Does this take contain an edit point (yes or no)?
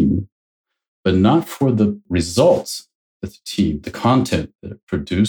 yes